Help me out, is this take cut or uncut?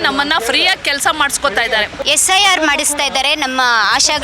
cut